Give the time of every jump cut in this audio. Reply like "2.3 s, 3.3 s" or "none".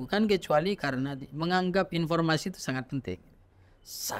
none